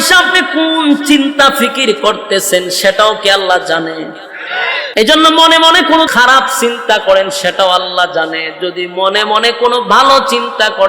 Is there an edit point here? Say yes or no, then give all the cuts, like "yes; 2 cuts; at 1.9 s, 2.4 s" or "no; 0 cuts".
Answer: yes; 2 cuts; at 4.8 s, 6.1 s